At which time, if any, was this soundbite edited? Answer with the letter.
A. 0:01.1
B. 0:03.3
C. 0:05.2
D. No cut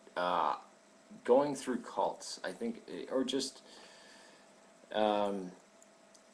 B